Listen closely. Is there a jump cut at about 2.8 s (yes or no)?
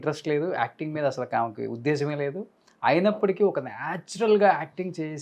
no